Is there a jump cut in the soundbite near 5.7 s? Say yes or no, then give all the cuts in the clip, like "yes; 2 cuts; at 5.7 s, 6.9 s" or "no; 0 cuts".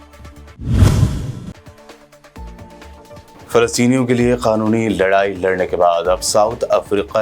no; 1 cut; at 3.3 s